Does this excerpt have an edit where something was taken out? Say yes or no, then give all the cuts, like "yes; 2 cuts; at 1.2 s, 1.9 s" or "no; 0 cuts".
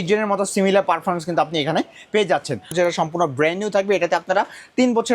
yes; 1 cut; at 2.7 s